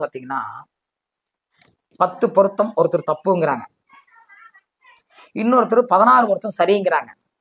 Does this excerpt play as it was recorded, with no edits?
yes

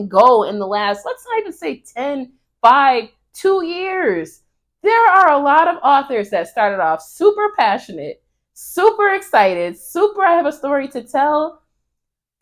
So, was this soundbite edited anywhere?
no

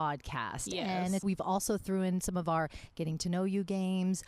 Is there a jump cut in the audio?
yes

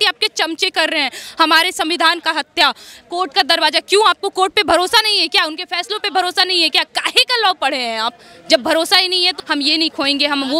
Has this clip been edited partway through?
yes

